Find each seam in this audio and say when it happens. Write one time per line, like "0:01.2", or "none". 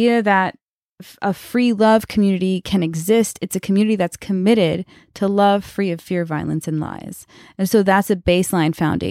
none